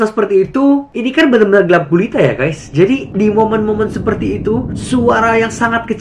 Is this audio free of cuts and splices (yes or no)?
yes